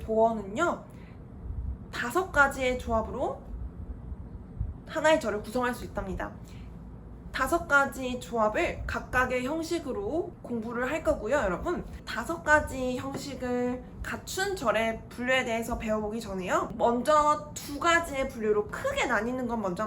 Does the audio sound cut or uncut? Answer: cut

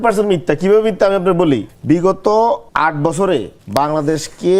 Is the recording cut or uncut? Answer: cut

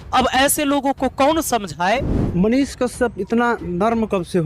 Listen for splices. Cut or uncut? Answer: cut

